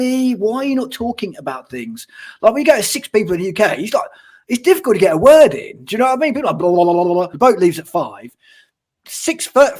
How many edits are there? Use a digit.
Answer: 1